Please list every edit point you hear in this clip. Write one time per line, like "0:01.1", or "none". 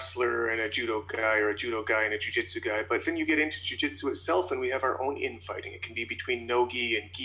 none